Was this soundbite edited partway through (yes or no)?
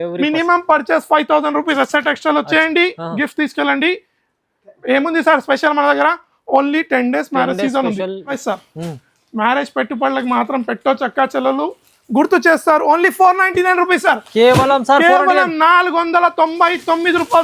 yes